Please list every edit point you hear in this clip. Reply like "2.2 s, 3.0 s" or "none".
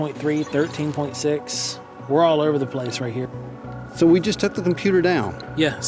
3.3 s